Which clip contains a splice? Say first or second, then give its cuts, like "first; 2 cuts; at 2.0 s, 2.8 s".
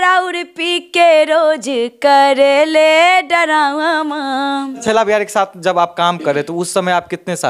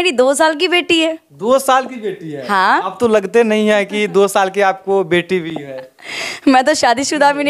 first; 1 cut; at 4.8 s